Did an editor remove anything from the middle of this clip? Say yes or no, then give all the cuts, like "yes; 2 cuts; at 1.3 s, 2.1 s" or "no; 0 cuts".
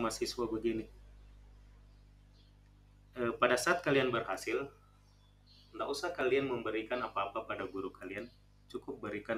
no; 0 cuts